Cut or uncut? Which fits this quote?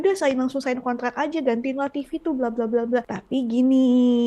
cut